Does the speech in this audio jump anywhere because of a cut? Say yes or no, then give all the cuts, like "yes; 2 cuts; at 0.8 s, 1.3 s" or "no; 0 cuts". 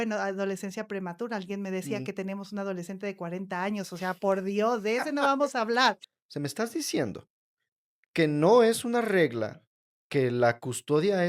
yes; 1 cut; at 6.0 s